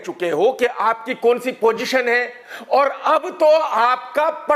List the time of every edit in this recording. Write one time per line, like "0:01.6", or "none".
none